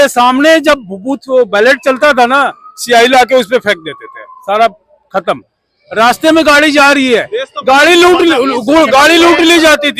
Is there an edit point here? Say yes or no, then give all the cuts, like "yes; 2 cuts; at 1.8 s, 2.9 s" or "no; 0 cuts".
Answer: no; 0 cuts